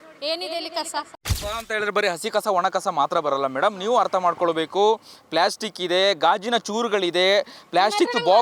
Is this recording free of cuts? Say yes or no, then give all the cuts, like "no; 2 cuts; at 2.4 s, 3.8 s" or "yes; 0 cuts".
no; 1 cut; at 1.3 s